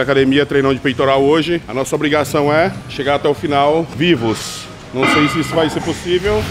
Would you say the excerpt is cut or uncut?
cut